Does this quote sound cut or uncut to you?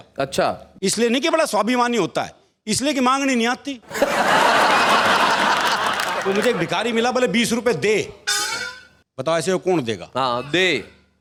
uncut